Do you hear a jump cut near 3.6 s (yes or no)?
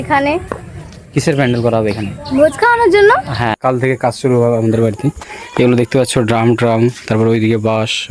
yes